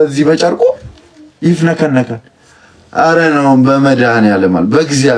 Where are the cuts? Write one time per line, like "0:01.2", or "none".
none